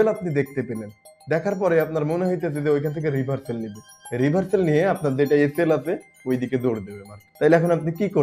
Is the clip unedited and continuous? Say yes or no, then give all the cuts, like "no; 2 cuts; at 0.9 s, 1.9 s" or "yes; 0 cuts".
yes; 0 cuts